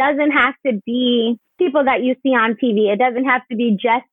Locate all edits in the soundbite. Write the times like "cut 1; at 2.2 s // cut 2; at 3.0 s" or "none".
cut 1; at 1.5 s